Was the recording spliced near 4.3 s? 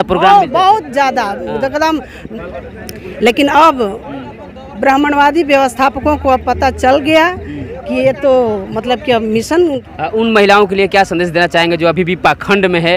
no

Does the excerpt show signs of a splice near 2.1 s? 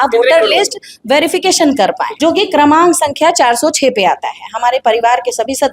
yes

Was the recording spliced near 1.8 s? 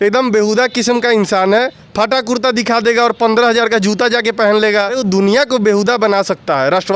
yes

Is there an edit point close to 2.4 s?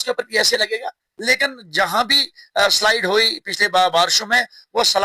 no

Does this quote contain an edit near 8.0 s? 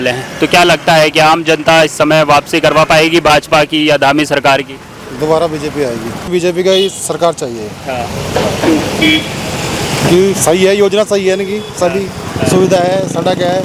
no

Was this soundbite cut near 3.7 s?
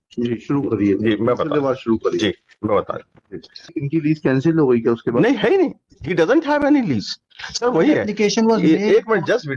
yes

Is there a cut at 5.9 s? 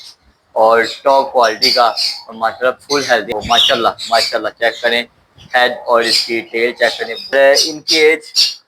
no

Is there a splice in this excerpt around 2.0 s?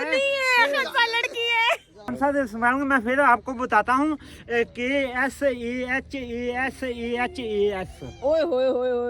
yes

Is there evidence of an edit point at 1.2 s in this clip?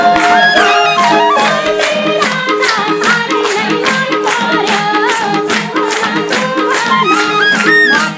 no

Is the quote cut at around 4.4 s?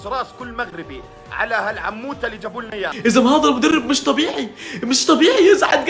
no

